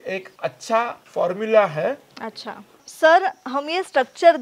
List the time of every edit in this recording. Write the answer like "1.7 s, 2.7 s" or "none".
none